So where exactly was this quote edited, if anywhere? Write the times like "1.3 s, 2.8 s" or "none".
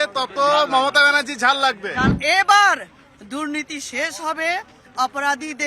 2.1 s